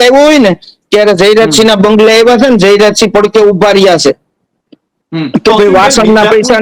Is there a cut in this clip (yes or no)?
no